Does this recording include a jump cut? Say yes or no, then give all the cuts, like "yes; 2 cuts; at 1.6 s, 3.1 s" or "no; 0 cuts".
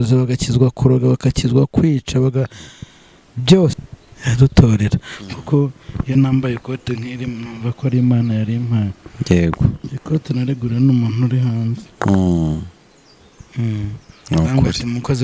yes; 1 cut; at 3.8 s